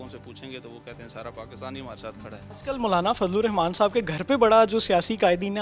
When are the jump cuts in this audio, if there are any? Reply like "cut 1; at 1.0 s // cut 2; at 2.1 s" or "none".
cut 1; at 2.5 s